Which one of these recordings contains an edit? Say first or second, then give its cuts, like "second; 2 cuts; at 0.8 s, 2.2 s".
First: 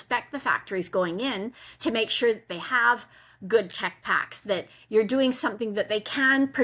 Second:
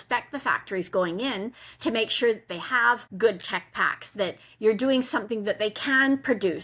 second; 1 cut; at 3.1 s